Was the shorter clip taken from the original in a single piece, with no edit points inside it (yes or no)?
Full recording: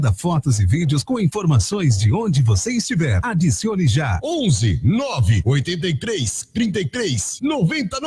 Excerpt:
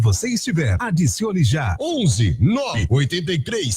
no